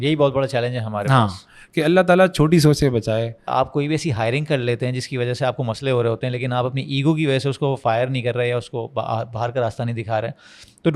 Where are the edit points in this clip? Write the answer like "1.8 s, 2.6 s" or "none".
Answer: 3.5 s

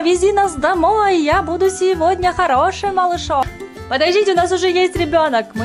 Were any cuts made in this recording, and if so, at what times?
3.4 s

